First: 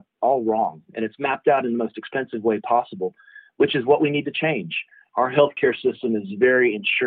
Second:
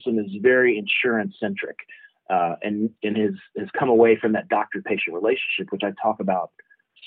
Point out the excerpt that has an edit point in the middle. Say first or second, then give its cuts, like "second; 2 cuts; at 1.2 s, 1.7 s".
first; 1 cut; at 5.0 s